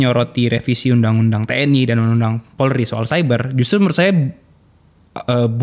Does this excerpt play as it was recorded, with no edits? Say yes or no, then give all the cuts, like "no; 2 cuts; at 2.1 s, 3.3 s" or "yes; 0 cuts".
yes; 0 cuts